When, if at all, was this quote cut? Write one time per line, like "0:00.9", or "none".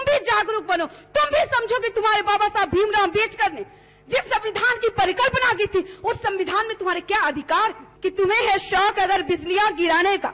0:07.9